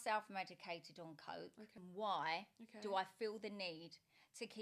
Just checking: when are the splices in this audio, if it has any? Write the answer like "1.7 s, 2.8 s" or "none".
1.8 s